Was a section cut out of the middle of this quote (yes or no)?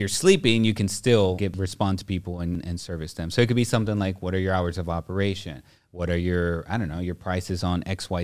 yes